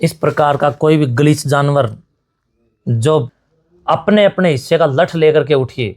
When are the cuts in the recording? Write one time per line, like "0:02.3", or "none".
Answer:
0:03.4

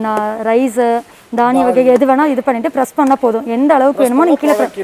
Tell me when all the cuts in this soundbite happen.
none

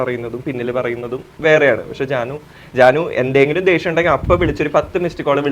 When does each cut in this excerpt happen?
none

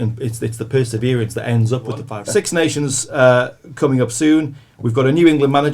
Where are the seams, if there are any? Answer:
0:02.1

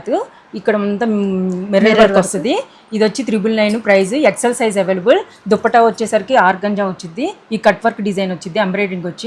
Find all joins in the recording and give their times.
none

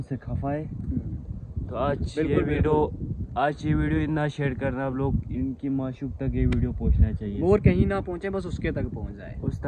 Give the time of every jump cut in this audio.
none

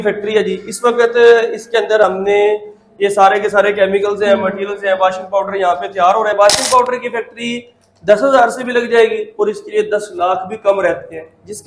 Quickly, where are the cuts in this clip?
0:06.4

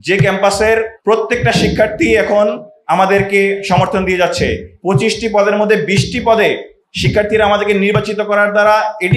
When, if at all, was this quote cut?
0:00.9
0:04.7

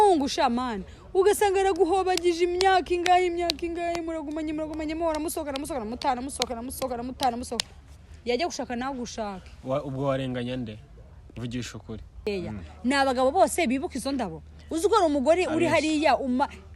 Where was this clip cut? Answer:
0:12.2

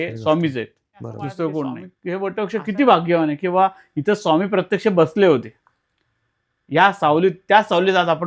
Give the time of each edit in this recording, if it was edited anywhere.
0:01.9

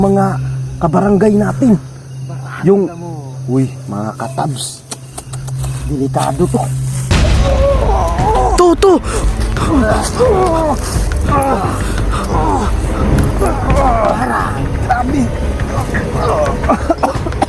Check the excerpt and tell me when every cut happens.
0:07.1

